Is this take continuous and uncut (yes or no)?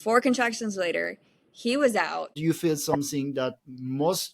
no